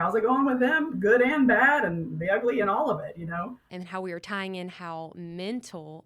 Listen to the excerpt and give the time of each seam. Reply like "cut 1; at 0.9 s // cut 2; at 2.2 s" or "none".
cut 1; at 3.7 s